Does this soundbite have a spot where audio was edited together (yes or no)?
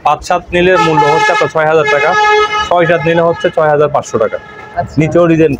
no